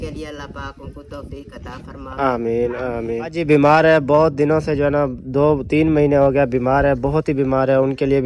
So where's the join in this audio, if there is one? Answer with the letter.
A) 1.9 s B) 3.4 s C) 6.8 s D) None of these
B